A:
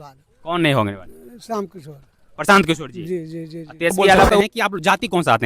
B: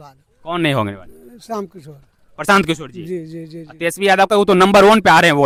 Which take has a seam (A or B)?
A